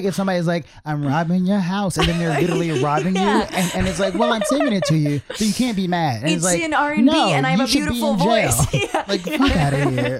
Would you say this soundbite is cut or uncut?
cut